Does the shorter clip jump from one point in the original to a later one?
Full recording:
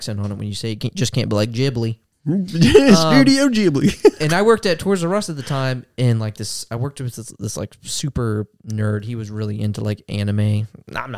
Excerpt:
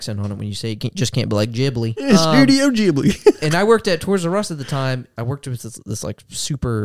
yes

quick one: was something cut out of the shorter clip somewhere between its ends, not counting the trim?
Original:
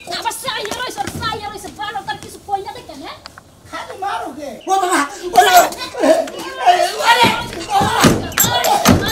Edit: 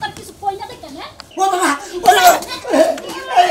yes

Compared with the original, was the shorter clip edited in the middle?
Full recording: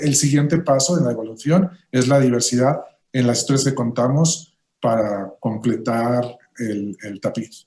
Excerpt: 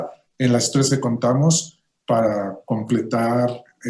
no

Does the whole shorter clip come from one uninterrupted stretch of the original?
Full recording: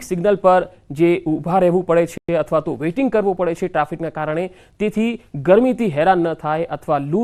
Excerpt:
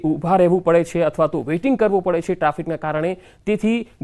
no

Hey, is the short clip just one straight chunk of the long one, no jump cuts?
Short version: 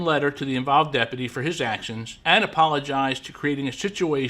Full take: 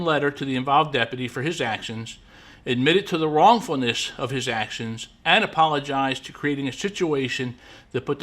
no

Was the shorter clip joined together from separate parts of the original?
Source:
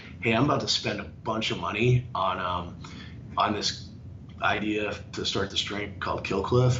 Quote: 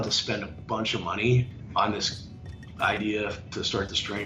yes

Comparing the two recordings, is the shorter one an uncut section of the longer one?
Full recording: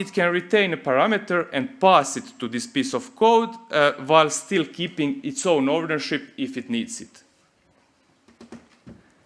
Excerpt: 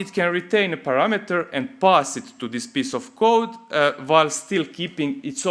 yes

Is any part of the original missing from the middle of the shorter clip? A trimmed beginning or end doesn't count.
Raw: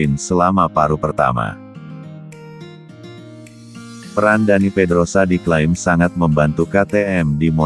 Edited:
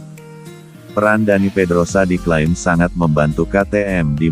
yes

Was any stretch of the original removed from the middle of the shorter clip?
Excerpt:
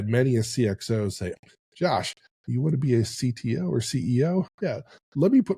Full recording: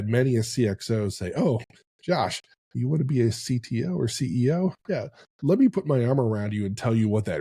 yes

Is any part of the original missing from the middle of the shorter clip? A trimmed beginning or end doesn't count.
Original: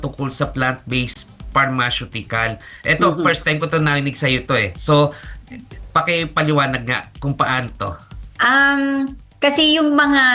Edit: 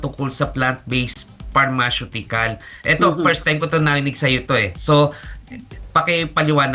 no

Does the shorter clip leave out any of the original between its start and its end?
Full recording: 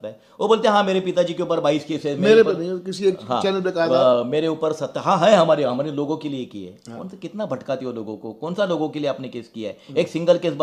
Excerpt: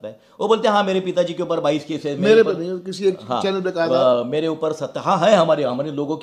no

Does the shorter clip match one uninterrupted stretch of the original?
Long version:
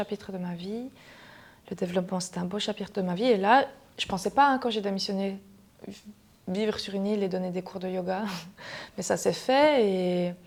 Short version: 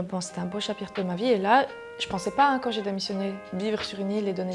no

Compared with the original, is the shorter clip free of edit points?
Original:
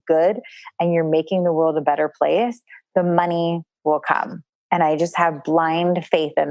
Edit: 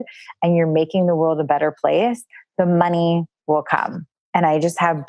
yes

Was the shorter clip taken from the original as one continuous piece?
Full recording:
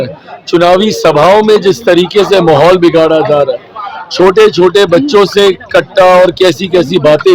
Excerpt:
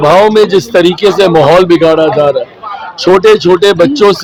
yes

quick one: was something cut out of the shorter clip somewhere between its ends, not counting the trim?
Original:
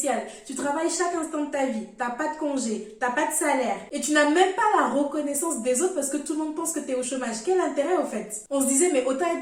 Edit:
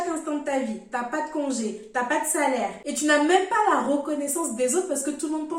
no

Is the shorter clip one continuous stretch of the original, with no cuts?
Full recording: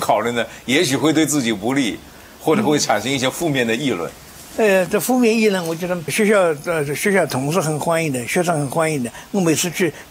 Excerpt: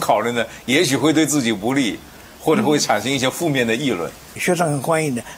no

